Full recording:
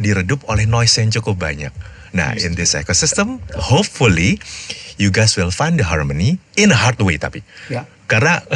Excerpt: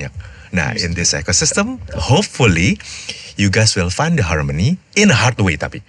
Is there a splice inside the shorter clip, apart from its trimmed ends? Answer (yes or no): no